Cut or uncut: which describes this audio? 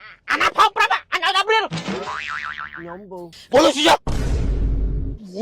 cut